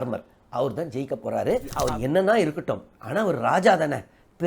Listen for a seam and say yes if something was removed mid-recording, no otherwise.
yes